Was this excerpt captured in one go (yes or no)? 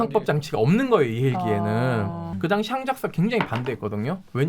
no